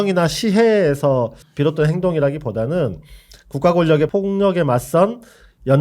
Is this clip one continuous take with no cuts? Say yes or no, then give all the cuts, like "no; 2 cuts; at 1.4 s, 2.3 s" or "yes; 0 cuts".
no; 2 cuts; at 1.4 s, 4.1 s